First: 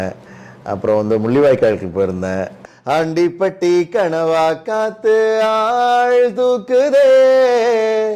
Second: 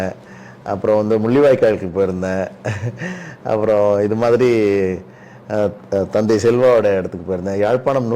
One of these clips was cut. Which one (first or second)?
first